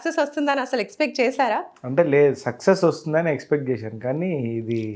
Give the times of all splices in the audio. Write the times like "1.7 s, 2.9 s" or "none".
none